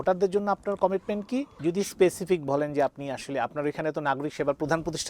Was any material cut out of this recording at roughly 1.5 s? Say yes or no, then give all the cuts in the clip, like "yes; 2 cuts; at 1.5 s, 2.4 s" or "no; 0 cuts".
yes; 1 cut; at 1.5 s